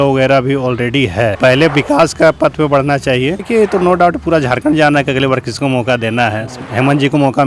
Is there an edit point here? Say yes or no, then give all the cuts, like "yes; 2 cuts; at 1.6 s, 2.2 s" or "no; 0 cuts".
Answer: yes; 2 cuts; at 1.4 s, 3.4 s